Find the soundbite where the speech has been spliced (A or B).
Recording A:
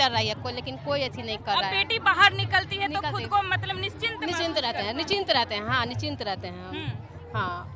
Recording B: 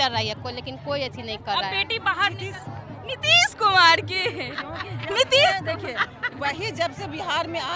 B